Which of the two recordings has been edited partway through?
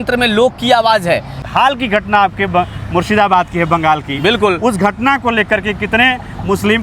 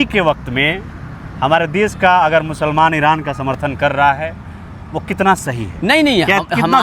first; 1 cut; at 1.5 s

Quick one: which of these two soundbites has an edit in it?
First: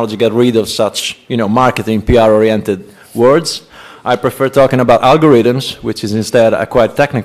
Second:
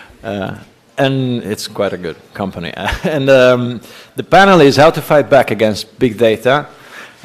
first; 1 cut; at 5.2 s

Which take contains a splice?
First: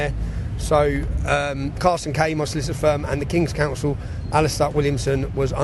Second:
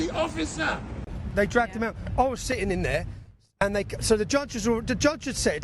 second; 1 cut; at 1.2 s

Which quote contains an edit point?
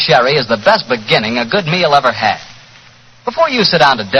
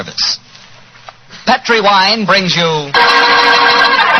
first; 1 cut; at 1.5 s

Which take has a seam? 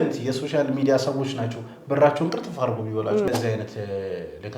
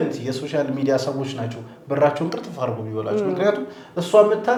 first; 1 cut; at 3.3 s

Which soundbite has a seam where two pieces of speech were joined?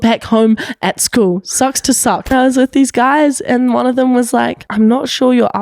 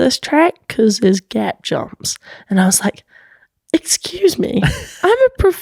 first; 2 cuts; at 2.3 s, 4.6 s

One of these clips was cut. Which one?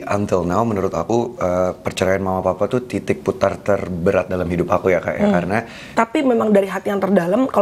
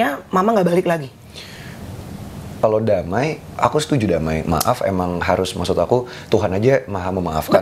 first; 1 cut; at 6.0 s

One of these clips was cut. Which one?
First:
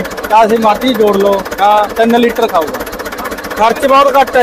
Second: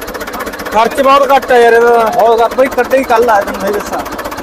second; 1 cut; at 2.6 s

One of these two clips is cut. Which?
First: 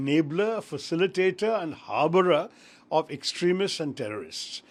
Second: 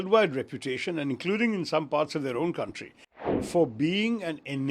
second; 1 cut; at 3.4 s

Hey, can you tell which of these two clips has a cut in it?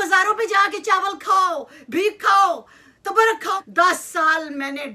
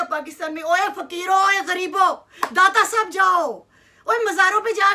first; 1 cut; at 3.5 s

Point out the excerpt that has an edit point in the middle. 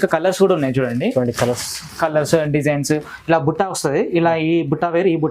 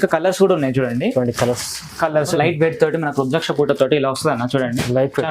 second; 1 cut; at 2.3 s

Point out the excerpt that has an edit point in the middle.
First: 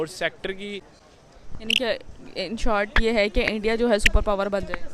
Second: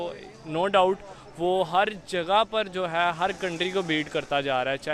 first; 1 cut; at 0.9 s

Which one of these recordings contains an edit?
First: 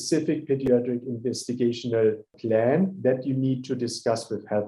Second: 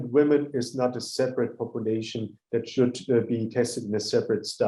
first; 1 cut; at 2.3 s

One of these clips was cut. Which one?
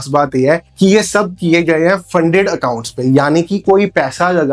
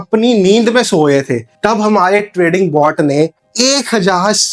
first; 1 cut; at 3.6 s

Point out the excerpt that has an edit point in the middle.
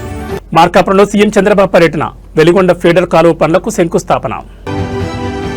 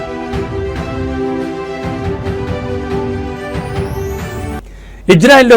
second; 1 cut; at 4.6 s

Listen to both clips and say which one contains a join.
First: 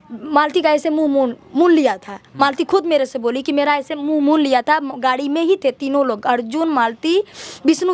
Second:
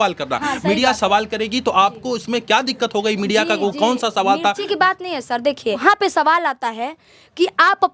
second; 1 cut; at 5.8 s

